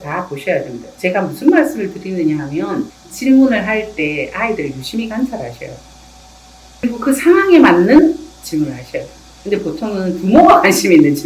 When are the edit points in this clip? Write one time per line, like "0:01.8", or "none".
0:03.0
0:06.8